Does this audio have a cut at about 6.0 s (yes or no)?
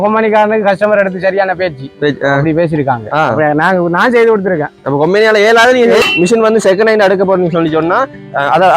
yes